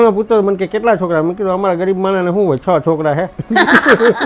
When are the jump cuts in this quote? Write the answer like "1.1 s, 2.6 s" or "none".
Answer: none